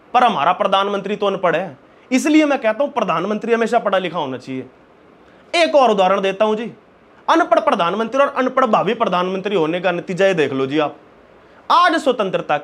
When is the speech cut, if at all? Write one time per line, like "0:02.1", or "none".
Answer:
none